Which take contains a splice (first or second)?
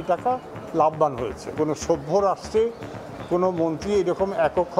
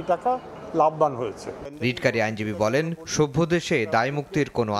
first